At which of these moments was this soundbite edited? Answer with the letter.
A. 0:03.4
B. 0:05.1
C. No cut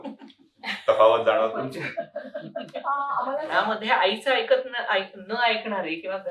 A